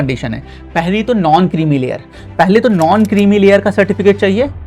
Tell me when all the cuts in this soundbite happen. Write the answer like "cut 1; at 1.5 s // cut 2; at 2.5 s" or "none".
none